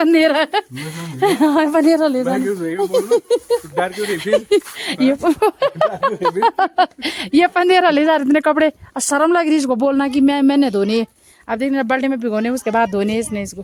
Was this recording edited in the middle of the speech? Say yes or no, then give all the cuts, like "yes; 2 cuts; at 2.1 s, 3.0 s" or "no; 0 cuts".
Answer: no; 0 cuts